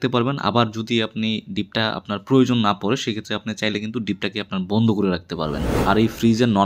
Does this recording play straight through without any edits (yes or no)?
no